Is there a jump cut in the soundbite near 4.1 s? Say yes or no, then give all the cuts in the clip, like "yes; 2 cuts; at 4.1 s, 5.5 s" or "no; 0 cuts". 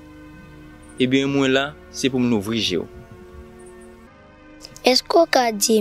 yes; 1 cut; at 4.1 s